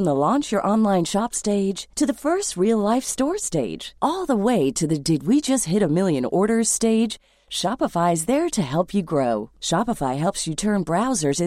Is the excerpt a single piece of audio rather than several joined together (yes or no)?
yes